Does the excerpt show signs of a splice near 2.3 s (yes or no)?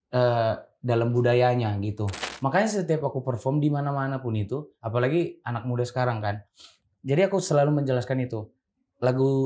yes